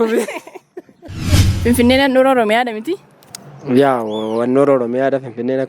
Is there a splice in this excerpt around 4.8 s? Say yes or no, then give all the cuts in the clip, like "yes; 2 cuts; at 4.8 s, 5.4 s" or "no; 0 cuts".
no; 1 cut; at 1.4 s